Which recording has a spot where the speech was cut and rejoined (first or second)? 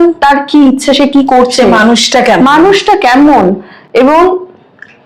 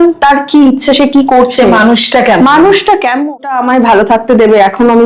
second